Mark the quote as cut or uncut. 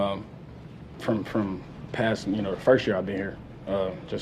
uncut